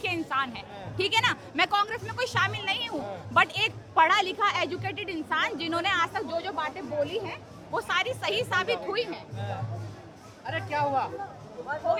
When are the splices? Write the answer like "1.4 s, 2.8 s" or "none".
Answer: none

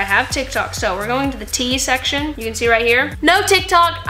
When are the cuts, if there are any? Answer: none

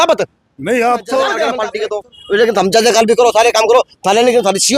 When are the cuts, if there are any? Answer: 1.6 s

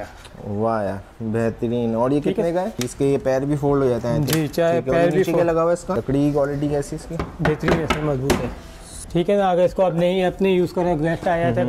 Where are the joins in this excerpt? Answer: 2.8 s, 6.0 s, 9.0 s

